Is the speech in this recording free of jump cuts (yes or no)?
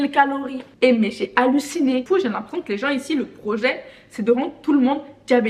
no